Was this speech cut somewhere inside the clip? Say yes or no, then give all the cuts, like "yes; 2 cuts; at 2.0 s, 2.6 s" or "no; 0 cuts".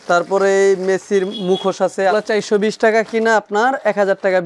yes; 1 cut; at 2.1 s